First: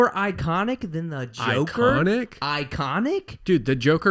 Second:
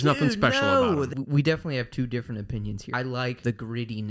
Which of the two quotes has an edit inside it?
second; 2 cuts; at 1.2 s, 3.0 s

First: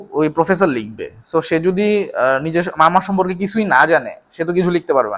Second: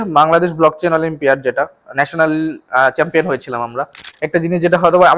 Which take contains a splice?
second; 1 cut; at 4.2 s

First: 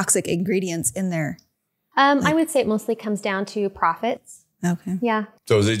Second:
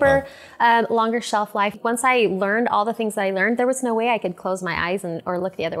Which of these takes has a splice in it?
second; 1 cut; at 1.7 s

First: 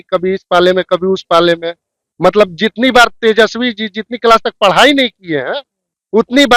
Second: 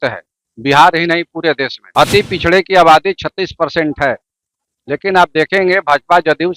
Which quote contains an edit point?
second; 1 cut; at 1.8 s

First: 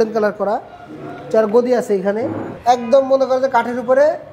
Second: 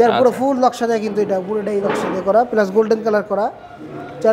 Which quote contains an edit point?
first; 1 cut; at 2.5 s

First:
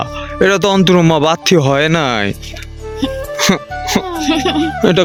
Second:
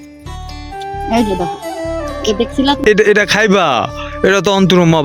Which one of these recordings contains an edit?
second; 1 cut; at 2.8 s

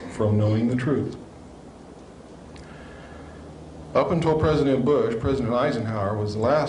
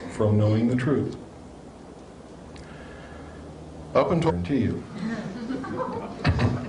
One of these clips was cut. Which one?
first; 1 cut; at 4.3 s

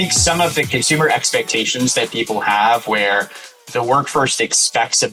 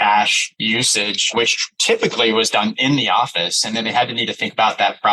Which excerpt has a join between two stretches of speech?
second; 1 cut; at 1.7 s

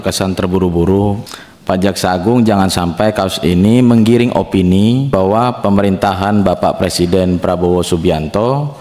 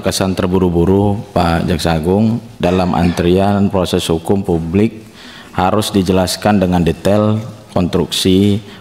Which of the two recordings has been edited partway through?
first; 2 cuts; at 1.2 s, 5.1 s

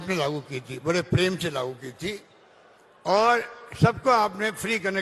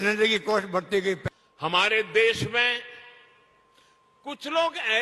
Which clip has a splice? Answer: second; 1 cut; at 1.2 s

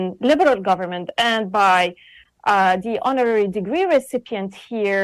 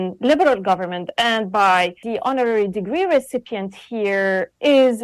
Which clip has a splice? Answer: second; 1 cut; at 2.0 s

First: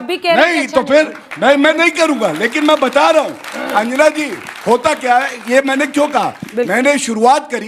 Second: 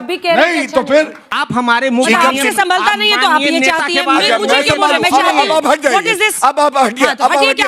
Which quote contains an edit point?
second; 1 cut; at 1.3 s

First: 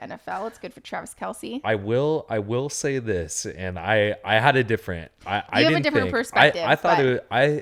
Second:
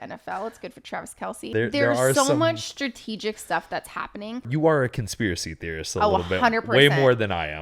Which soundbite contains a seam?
second; 2 cuts; at 1.5 s, 4.5 s

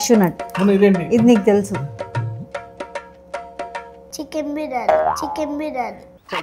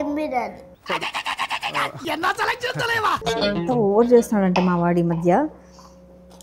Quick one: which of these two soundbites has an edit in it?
second; 1 cut; at 3.4 s

